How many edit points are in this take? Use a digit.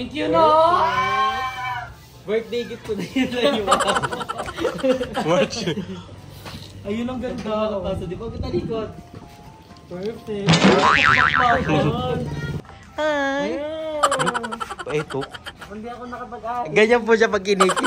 1